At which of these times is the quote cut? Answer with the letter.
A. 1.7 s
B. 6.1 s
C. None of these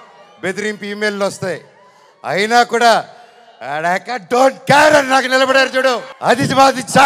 B